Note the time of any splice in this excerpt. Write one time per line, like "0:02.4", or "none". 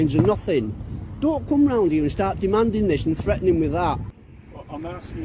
0:04.1